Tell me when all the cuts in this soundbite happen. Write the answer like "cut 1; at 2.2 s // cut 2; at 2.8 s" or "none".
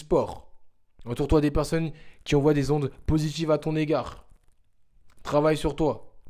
none